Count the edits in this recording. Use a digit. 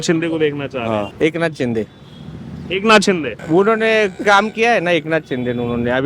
2